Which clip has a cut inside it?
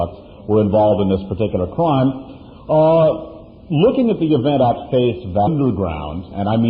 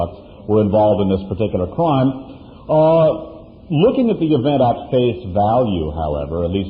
second; 1 cut; at 5.5 s

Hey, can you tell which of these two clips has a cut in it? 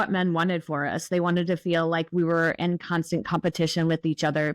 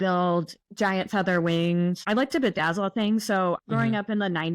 second; 2 cuts; at 2.0 s, 3.6 s

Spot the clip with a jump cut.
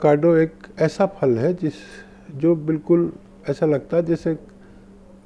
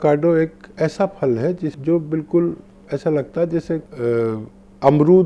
second; 2 cuts; at 1.8 s, 3.9 s

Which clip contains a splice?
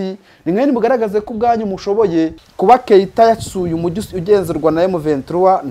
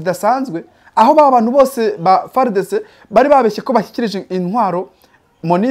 first; 1 cut; at 2.4 s

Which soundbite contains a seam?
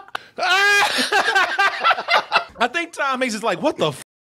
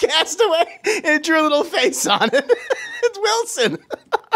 first; 1 cut; at 2.5 s

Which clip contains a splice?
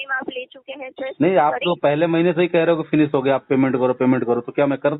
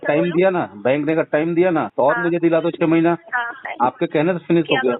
second; 2 cuts; at 1.9 s, 3.6 s

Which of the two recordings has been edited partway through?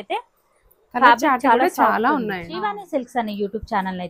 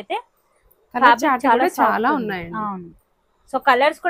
first; 1 cut; at 2.8 s

